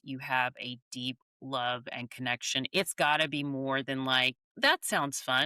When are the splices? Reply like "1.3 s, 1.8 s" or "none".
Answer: 2.7 s, 4.4 s